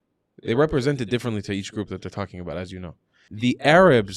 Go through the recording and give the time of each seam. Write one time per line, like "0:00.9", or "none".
0:03.2